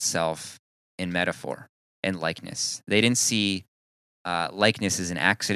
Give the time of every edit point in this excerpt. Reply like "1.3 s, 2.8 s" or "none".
1.8 s